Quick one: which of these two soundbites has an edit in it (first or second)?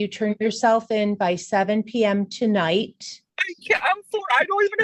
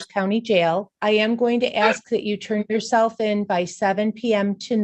second